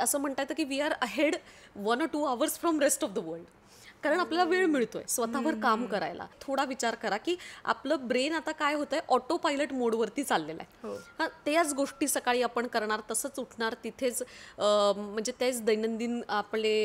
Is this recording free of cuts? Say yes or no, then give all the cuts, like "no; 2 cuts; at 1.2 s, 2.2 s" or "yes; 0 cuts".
no; 1 cut; at 6.4 s